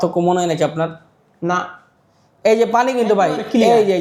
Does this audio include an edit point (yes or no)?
no